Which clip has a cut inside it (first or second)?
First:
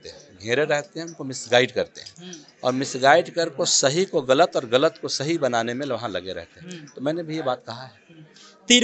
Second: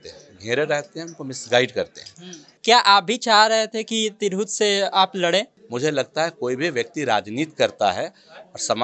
second